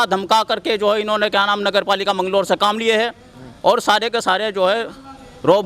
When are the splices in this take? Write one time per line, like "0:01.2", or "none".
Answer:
none

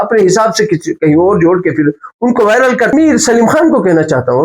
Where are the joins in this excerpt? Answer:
0:02.9

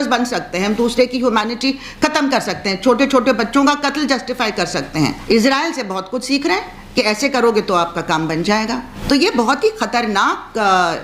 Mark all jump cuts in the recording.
0:05.2
0:08.9

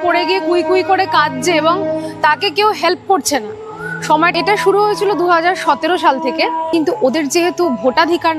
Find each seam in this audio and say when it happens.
0:04.3
0:06.6

